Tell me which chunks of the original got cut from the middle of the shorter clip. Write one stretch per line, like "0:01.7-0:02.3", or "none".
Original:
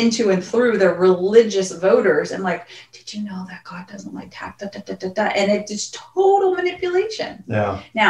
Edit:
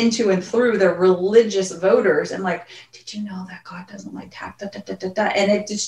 none